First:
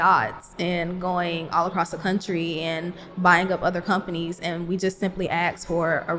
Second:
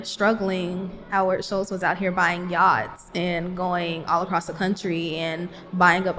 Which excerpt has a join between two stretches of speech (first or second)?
second